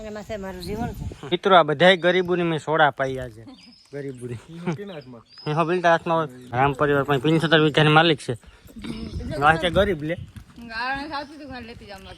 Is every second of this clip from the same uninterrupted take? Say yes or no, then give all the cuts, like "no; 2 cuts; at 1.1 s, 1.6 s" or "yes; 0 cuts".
no; 2 cuts; at 1.1 s, 6.5 s